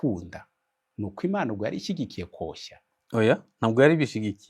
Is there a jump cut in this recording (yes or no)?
no